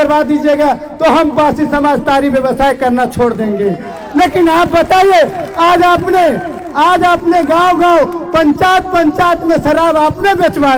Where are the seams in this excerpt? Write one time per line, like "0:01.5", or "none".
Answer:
none